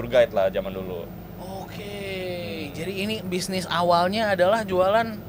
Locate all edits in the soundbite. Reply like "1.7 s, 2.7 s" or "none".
none